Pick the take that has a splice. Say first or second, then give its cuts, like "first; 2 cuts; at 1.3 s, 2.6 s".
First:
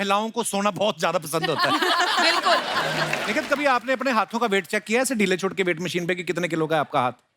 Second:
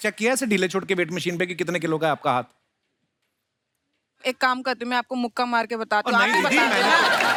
first; 1 cut; at 3.2 s